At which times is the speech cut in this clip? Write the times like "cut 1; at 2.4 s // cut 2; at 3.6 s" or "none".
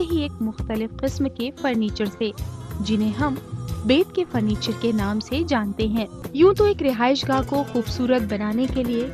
cut 1; at 6.2 s